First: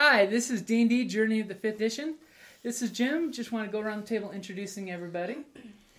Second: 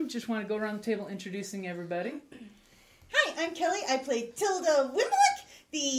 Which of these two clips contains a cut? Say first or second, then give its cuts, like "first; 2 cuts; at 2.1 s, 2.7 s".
first; 1 cut; at 1.8 s